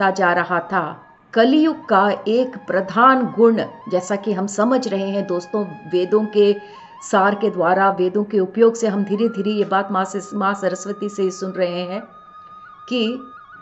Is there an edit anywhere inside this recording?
no; 0 cuts

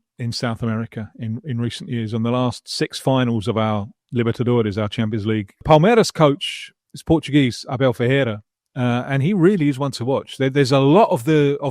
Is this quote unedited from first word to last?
no; 1 cut; at 5.6 s

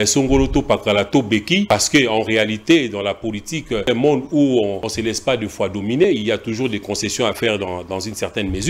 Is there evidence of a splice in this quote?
yes; 3 cuts; at 1.7 s, 3.9 s, 4.9 s

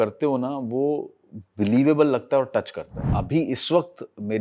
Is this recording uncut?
no; 1 cut; at 3.0 s

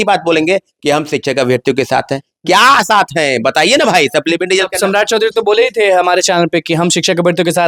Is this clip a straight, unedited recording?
yes; 0 cuts

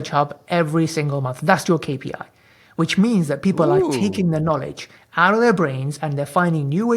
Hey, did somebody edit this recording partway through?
no; 0 cuts

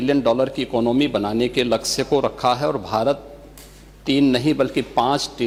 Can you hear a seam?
no; 0 cuts

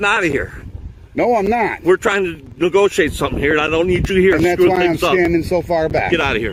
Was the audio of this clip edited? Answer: no; 0 cuts

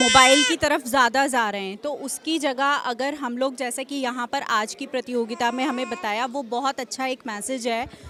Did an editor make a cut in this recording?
no; 0 cuts

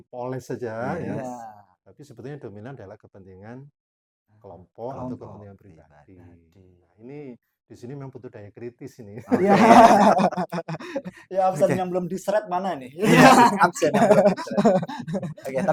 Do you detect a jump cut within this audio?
no; 0 cuts

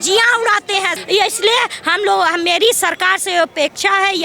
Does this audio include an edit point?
yes; 1 cut; at 0.9 s

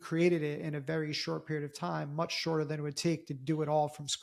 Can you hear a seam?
no; 0 cuts

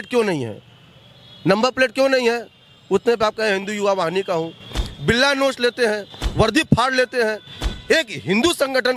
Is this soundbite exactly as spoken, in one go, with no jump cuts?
yes; 0 cuts

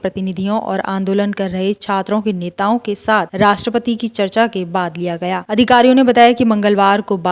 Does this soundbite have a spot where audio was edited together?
yes; 1 cut; at 5.4 s

